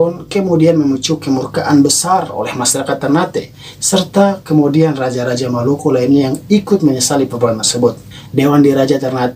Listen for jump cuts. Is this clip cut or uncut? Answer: uncut